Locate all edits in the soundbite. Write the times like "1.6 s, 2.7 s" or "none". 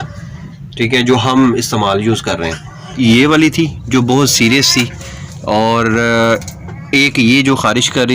2.9 s